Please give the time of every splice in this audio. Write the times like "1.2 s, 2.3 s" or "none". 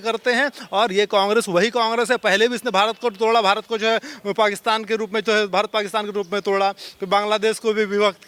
none

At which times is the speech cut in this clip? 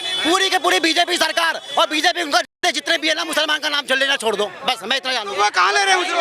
none

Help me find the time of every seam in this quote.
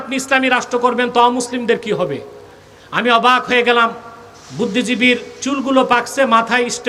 none

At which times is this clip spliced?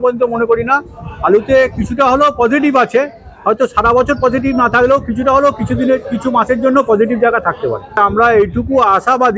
8.0 s

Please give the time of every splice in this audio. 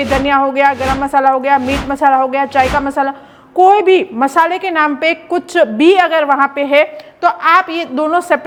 none

